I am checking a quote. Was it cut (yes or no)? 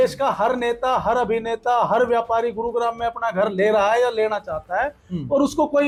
no